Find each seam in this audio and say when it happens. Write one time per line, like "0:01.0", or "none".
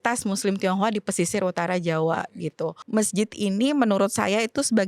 0:02.8